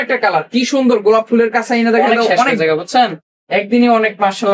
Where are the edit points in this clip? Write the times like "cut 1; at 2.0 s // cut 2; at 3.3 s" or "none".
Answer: cut 1; at 2.5 s